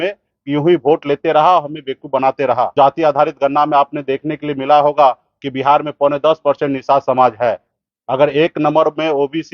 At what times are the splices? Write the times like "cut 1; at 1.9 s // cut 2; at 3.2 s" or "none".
cut 1; at 2.7 s